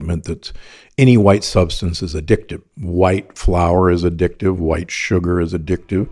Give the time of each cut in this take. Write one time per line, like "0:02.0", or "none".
0:02.7